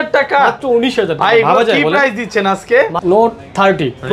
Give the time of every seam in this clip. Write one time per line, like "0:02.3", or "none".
0:03.0